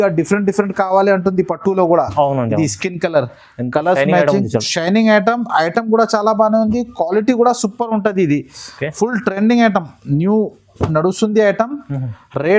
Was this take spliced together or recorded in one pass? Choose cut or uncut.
uncut